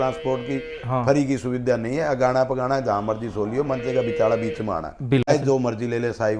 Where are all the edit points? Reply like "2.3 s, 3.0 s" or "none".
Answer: 5.3 s